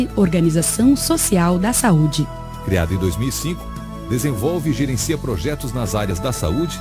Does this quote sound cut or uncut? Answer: uncut